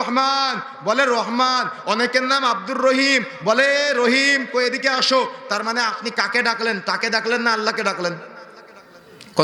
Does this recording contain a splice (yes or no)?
no